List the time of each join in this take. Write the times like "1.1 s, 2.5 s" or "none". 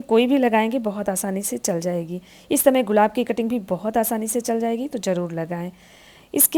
none